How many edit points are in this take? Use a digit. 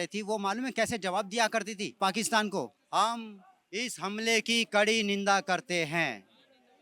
2